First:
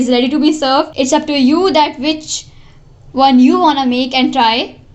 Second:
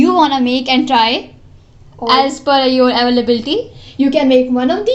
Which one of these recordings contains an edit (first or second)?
first